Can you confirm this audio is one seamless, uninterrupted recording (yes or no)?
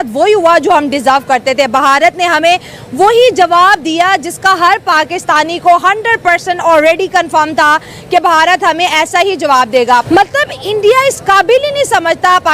no